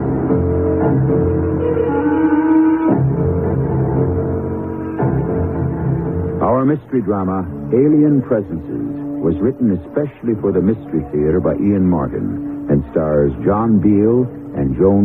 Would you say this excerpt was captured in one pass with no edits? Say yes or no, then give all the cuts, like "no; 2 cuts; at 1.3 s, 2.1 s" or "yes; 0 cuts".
no; 1 cut; at 11.2 s